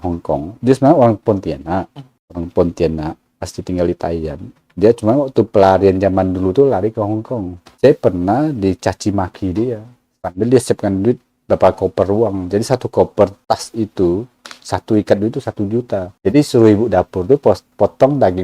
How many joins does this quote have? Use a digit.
1